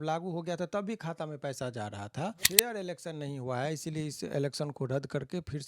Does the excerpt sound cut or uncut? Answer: cut